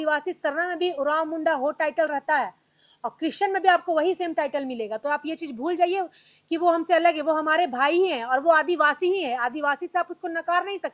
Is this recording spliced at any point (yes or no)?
no